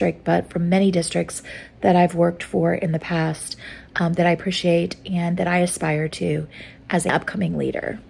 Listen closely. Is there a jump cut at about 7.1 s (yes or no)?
yes